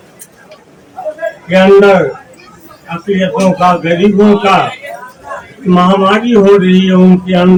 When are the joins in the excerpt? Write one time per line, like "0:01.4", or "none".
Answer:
none

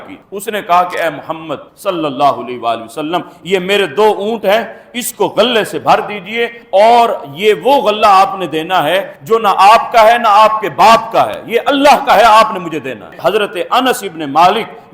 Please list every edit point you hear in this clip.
0:13.1

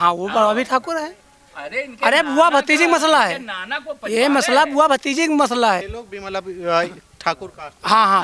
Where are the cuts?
0:06.0

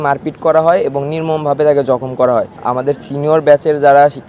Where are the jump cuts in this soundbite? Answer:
0:02.6

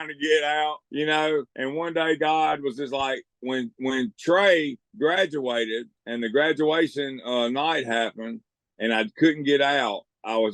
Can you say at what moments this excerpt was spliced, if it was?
0:00.8
0:01.5
0:03.3
0:04.8
0:06.0

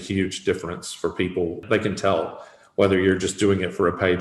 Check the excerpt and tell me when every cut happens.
0:01.6

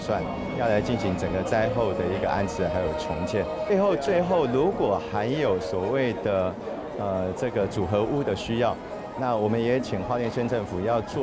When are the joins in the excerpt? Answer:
0:03.7

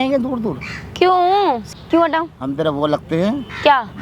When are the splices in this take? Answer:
0:01.6

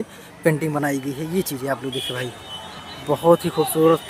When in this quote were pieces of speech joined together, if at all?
none

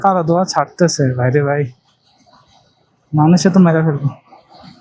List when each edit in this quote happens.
none

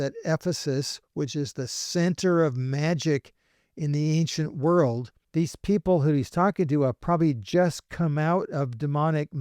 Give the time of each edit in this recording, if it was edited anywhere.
0:05.2

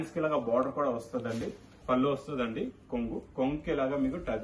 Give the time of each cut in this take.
0:01.7

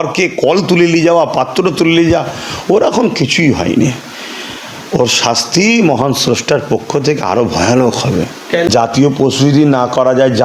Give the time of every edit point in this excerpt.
0:08.4

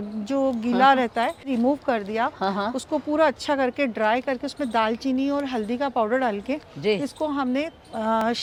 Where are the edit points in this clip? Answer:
none

